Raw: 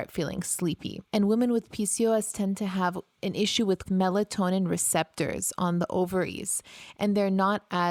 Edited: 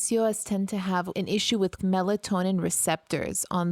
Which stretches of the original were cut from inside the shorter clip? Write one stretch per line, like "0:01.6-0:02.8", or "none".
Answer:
0:03.0-0:03.2